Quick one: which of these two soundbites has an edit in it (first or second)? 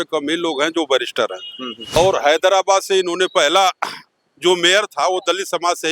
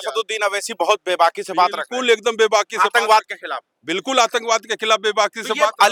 first